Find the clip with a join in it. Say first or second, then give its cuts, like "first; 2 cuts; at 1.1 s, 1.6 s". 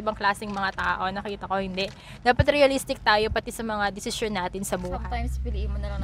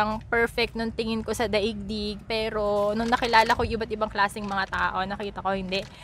first; 1 cut; at 5.0 s